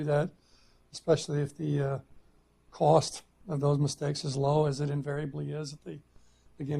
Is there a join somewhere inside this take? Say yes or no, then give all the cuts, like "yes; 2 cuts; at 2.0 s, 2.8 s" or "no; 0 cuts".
yes; 1 cut; at 4.4 s